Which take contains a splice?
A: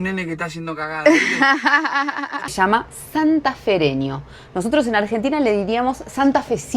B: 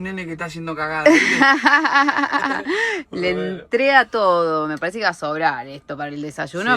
A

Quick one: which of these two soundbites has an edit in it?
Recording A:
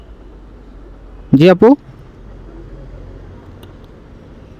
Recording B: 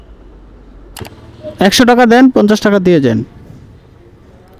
B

